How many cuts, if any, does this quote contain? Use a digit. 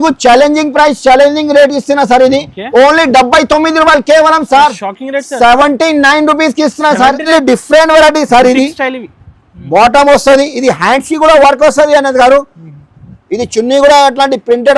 1